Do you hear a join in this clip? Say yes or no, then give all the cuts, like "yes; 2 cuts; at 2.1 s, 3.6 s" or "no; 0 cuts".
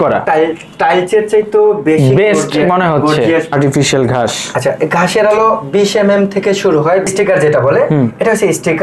yes; 2 cuts; at 3.5 s, 7.1 s